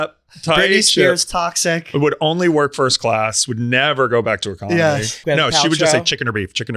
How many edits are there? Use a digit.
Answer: 1